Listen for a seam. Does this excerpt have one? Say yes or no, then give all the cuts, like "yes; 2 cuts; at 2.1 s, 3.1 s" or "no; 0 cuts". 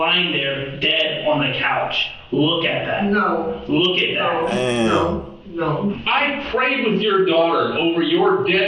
yes; 1 cut; at 6.0 s